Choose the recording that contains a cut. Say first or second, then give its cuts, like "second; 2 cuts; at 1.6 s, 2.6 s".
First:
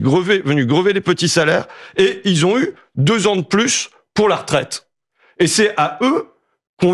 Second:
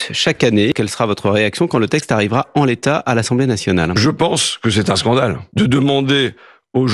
second; 3 cuts; at 0.7 s, 3.9 s, 5.4 s